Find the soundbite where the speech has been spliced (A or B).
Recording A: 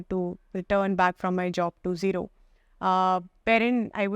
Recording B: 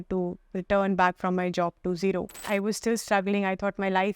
B